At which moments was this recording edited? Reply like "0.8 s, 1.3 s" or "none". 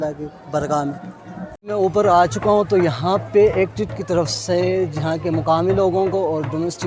1.6 s